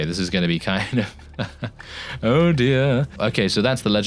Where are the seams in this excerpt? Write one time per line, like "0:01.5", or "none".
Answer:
0:03.2